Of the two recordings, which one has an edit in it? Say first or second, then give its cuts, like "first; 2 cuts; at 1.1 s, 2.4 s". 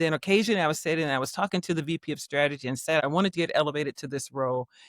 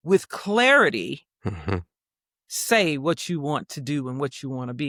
first; 1 cut; at 3.0 s